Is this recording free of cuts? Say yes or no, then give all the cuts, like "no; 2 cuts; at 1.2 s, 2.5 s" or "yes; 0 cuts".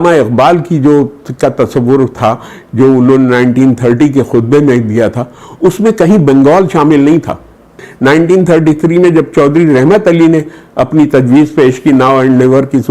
no; 1 cut; at 7.9 s